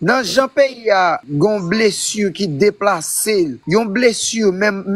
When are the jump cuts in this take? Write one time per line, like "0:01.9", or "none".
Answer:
0:01.2
0:03.6